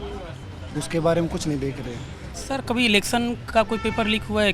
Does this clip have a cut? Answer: yes; 1 cut; at 2.3 s

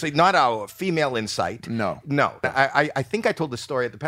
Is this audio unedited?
no; 1 cut; at 2.4 s

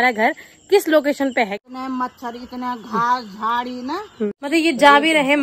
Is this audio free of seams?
no; 2 cuts; at 1.6 s, 4.3 s

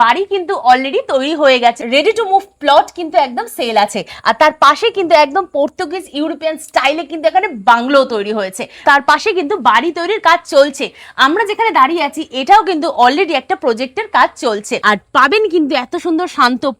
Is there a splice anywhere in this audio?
yes; 3 cuts; at 1.8 s, 8.8 s, 14.7 s

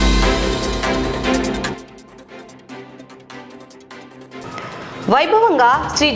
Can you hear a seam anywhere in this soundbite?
yes; 2 cuts; at 1.8 s, 4.1 s

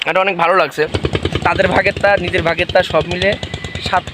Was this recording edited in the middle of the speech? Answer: yes; 1 cut; at 1.0 s

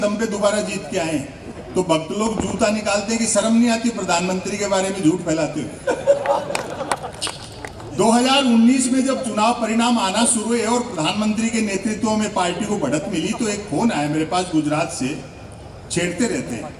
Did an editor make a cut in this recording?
no; 0 cuts

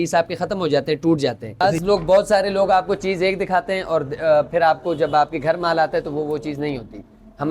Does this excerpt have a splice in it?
yes; 1 cut; at 1.6 s

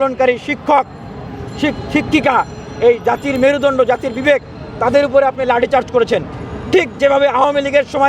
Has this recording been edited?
no; 0 cuts

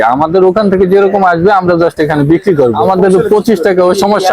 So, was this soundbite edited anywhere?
yes; 1 cut; at 2.8 s

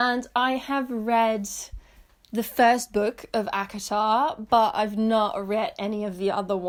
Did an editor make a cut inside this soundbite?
no; 0 cuts

